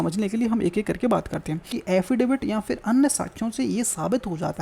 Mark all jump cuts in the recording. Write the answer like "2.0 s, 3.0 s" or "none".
1.7 s